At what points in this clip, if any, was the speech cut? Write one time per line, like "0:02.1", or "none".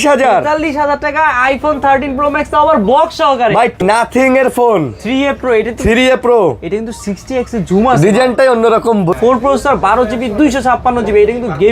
0:03.8
0:09.1